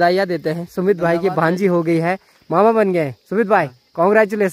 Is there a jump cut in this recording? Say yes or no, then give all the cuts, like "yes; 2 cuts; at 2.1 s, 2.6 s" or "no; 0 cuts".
no; 0 cuts